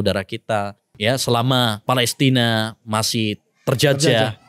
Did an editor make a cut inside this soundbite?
yes; 2 cuts; at 0.9 s, 1.8 s

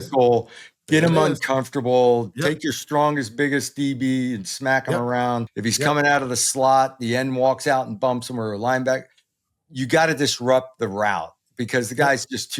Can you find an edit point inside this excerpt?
yes; 1 cut; at 5.5 s

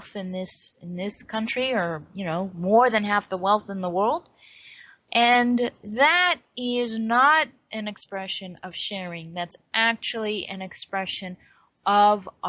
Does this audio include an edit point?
no; 0 cuts

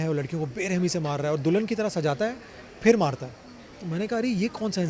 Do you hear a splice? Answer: no; 0 cuts

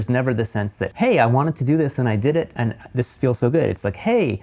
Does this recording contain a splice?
yes; 2 cuts; at 0.8 s, 2.5 s

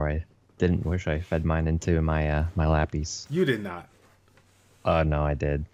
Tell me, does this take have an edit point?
no; 0 cuts

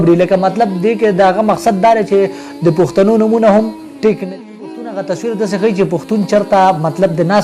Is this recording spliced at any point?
yes; 1 cut; at 4.3 s

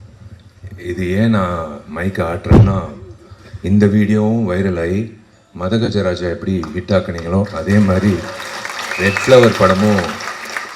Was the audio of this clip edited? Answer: no; 0 cuts

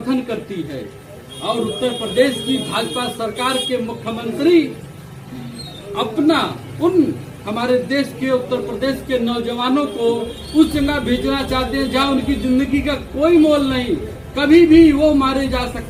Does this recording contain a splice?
no; 0 cuts

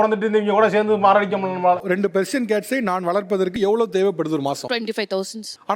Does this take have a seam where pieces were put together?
no; 0 cuts

